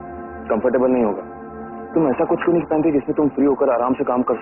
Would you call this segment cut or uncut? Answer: uncut